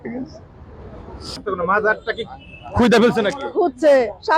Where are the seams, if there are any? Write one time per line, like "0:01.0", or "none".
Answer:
0:01.5